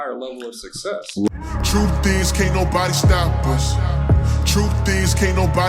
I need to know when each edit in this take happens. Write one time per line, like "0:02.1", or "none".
0:01.3